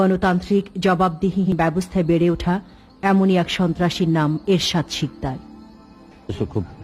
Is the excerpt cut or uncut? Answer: cut